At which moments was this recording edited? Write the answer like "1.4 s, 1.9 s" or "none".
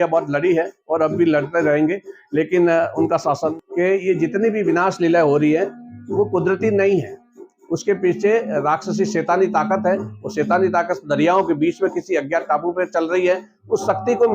3.6 s